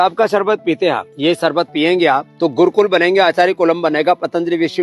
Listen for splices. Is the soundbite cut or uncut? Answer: cut